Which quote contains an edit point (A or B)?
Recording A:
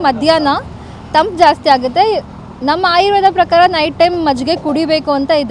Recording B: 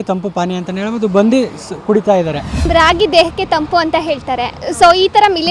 B